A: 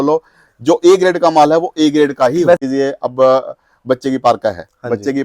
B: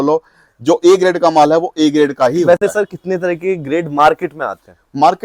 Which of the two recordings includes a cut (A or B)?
A